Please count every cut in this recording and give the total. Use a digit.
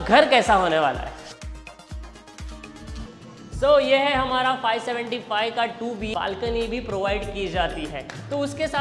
2